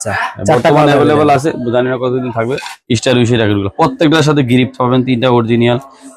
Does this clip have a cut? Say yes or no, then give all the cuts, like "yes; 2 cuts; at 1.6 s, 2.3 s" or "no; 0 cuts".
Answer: yes; 1 cut; at 2.7 s